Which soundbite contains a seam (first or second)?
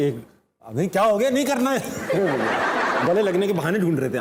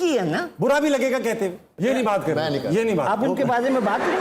second